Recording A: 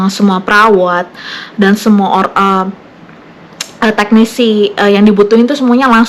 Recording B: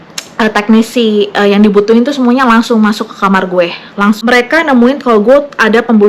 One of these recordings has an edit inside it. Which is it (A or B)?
B